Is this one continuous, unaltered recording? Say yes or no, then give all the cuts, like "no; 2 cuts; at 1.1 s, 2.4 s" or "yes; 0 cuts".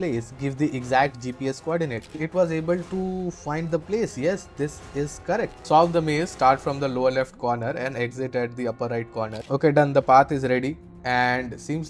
no; 3 cuts; at 2.2 s, 5.6 s, 9.4 s